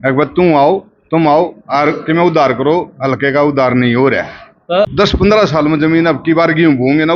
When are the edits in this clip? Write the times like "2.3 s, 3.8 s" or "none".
4.9 s

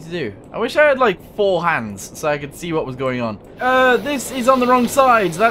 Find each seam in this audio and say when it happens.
3.5 s

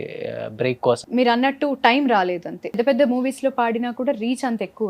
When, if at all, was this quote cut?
1.0 s, 2.8 s

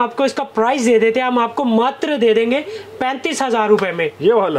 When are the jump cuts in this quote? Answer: none

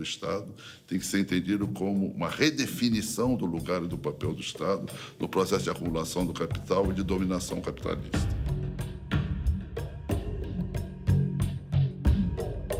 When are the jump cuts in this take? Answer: none

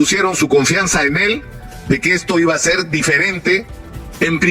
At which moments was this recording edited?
none

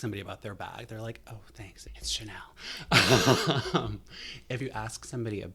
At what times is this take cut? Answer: none

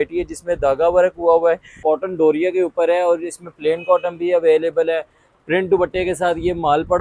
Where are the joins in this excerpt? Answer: 1.7 s

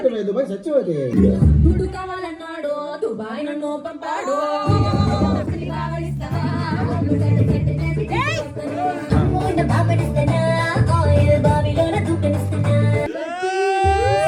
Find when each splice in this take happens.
1.1 s, 5.6 s, 9.1 s, 13.1 s

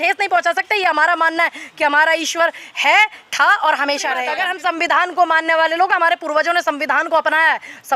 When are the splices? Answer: 4.3 s

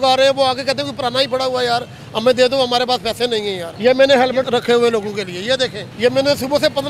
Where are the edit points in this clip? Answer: 3.6 s, 4.5 s, 5.8 s

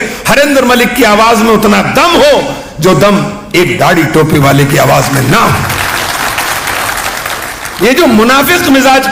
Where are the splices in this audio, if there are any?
none

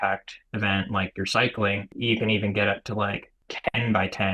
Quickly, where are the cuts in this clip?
1.9 s, 3.5 s

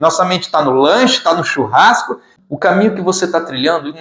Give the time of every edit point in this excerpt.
2.3 s

